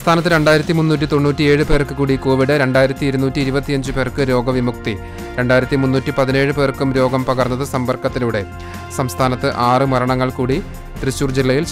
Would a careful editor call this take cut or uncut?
uncut